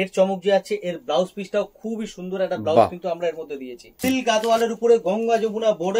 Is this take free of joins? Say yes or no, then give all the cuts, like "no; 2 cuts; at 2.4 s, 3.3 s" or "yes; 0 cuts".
no; 1 cut; at 4.0 s